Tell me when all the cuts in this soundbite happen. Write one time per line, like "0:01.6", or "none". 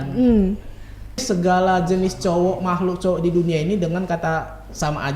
0:01.2